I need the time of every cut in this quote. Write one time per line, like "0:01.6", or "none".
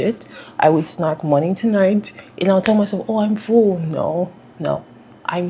none